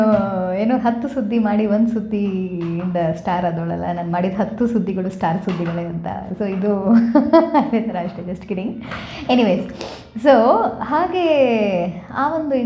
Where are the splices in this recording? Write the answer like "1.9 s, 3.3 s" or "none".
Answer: none